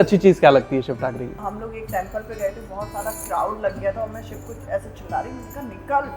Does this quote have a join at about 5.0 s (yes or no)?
no